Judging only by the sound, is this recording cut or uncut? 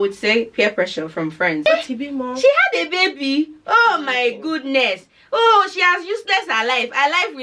cut